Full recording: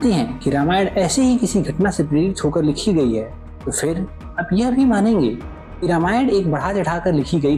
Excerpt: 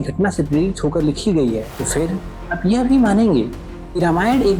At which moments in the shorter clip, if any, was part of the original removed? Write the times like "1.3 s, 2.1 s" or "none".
1.7 s

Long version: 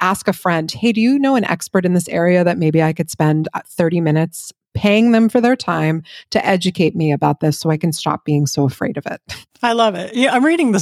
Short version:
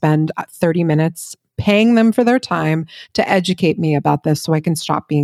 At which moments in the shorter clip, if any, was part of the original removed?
none

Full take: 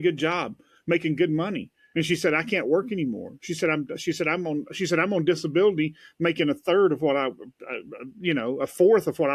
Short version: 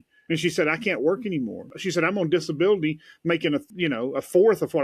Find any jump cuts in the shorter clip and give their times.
1.7 s, 3.6 s

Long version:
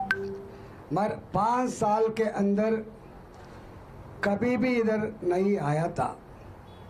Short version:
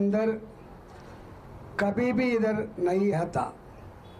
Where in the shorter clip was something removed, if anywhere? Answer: 3.1 s

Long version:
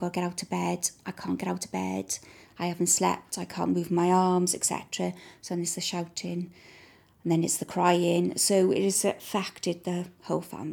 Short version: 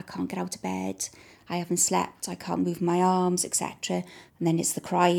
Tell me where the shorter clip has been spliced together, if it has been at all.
4.2 s

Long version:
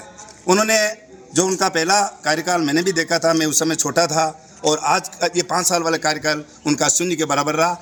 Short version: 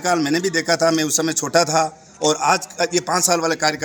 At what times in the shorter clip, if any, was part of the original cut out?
none

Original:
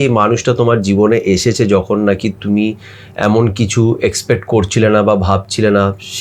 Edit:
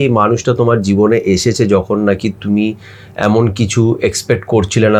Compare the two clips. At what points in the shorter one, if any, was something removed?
none

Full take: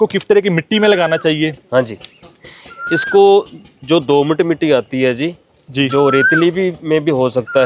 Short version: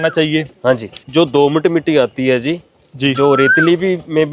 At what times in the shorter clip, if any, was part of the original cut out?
0.9 s

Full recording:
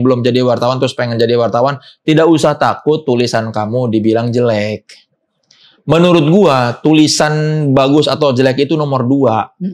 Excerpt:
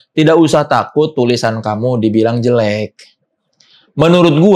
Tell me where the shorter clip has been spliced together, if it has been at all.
none

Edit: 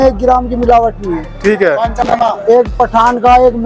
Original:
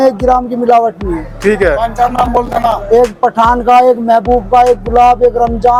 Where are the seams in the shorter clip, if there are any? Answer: 2.0 s

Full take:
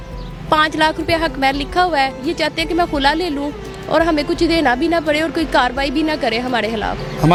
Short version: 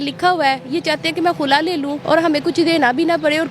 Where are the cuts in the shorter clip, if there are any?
2.0 s

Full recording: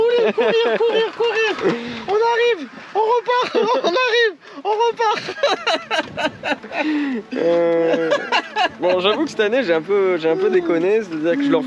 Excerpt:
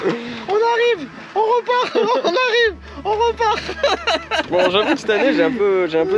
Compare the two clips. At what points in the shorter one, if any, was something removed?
4.5 s

